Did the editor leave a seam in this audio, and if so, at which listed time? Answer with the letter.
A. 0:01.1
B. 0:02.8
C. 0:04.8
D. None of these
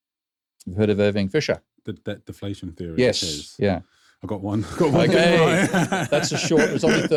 D